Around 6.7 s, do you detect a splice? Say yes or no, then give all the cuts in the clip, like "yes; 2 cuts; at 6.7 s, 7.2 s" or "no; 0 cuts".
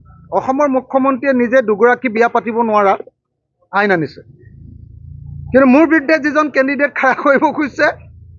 no; 0 cuts